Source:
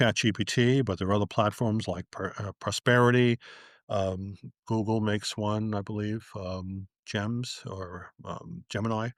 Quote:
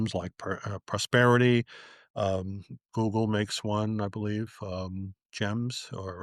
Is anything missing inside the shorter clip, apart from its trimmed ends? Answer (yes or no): no